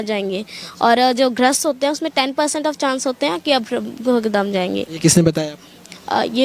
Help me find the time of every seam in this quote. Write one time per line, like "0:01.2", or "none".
none